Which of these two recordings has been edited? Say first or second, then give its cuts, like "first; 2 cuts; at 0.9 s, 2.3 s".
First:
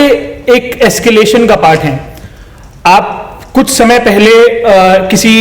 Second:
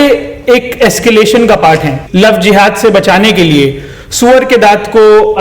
second; 1 cut; at 2.0 s